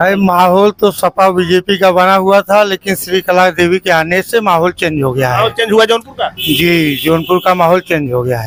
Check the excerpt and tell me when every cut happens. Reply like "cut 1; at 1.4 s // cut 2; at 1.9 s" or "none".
none